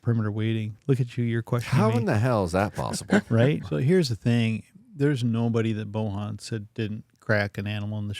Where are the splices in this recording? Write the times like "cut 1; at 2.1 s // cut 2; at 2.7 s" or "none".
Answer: cut 1; at 3.6 s

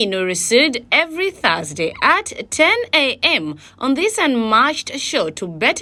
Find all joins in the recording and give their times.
none

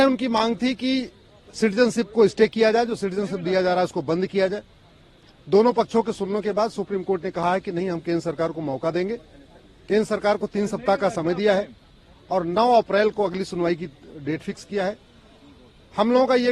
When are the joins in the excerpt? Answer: none

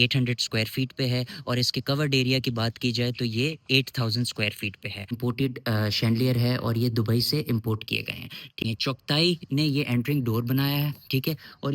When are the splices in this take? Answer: cut 1; at 5.2 s // cut 2; at 8.6 s

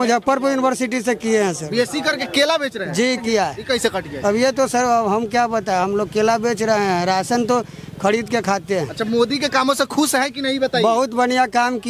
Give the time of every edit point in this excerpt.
cut 1; at 3.2 s

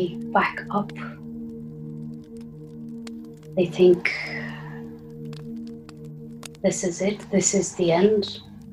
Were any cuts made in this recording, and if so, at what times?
cut 1; at 0.9 s // cut 2; at 3.5 s

